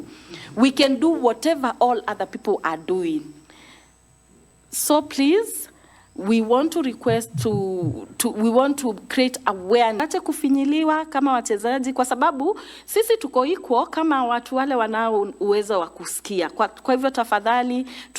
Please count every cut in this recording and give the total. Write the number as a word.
one